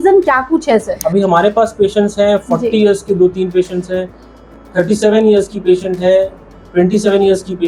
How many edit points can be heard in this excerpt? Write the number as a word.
one